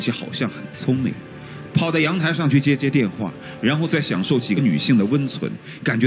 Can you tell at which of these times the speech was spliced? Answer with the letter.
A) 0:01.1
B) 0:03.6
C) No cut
C